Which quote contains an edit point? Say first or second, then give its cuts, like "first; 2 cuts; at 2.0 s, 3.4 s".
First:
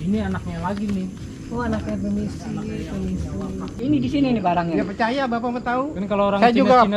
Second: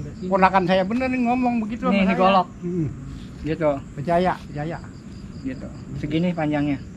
first; 1 cut; at 3.7 s